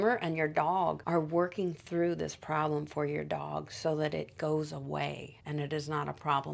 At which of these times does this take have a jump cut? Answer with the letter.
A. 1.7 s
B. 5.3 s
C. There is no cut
B